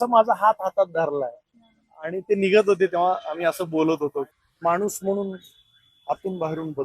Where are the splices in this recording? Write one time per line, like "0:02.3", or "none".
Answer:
0:04.3